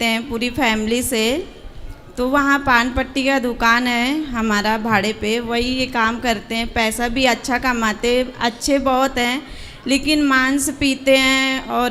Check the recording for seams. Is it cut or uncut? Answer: uncut